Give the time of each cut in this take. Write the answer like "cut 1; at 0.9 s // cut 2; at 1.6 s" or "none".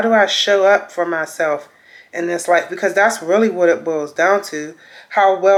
none